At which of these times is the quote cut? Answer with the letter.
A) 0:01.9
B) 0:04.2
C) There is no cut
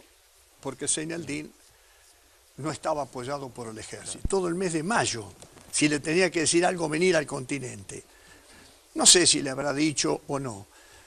C